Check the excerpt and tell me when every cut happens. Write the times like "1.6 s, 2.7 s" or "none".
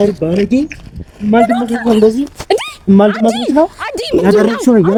none